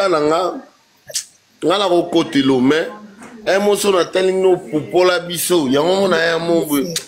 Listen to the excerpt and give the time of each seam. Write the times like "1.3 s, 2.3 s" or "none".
none